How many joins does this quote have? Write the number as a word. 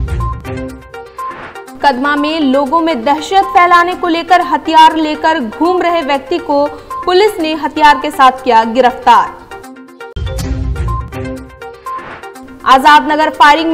one